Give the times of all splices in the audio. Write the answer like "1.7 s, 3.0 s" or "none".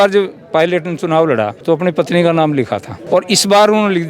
1.6 s, 2.9 s